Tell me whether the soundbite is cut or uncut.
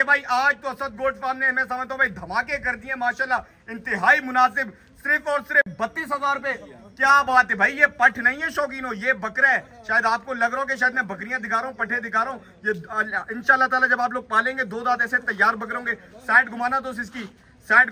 uncut